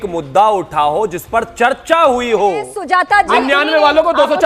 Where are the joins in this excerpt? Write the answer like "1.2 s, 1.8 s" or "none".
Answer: 2.7 s